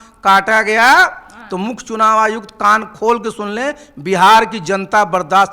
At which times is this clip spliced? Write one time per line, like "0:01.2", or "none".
none